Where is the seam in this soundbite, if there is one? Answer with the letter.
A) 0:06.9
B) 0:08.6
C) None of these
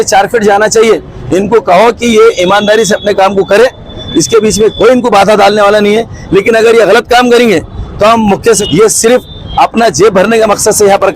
B